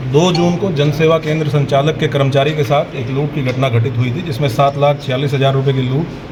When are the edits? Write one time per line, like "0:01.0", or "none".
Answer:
none